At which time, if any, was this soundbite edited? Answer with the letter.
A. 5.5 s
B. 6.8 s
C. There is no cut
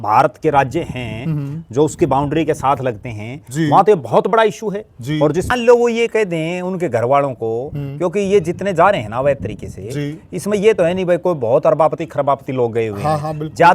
A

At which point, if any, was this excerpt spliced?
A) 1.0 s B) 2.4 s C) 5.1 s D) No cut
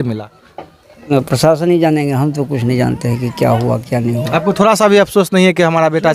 A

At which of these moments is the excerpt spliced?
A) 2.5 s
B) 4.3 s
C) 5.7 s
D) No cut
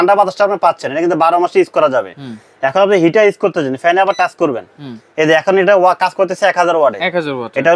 D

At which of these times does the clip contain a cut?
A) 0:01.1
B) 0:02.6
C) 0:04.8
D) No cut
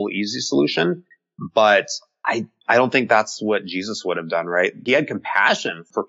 D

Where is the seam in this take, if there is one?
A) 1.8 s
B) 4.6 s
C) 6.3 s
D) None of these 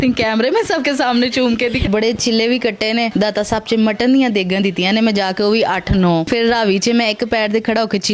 A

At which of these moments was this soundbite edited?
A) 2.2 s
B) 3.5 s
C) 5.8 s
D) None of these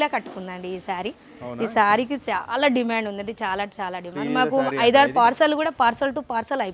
D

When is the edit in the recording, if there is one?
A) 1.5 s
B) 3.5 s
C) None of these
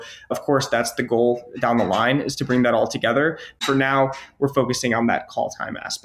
B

